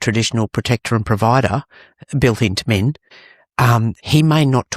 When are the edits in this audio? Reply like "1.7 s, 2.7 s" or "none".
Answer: 3.6 s